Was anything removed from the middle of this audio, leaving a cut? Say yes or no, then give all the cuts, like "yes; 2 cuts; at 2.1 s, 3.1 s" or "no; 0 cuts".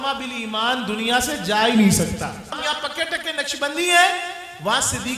yes; 1 cut; at 2.6 s